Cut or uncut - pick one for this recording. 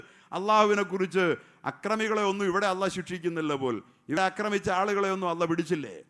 cut